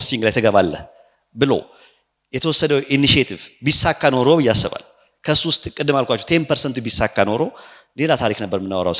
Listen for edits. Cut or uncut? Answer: uncut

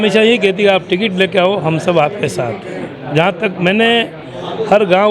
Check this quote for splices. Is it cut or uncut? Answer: uncut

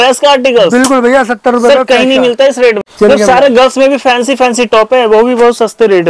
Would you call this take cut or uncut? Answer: cut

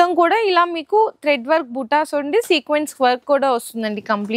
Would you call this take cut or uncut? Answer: uncut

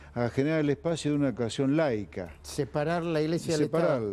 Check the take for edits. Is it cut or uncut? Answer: uncut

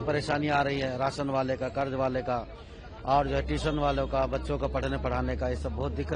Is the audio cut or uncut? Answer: uncut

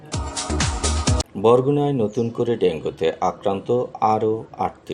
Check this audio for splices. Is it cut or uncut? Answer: uncut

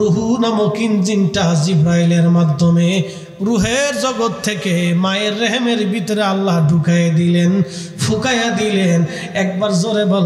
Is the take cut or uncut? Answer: uncut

